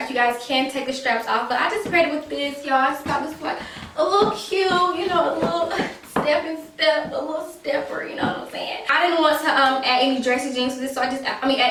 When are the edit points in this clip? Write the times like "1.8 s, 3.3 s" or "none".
none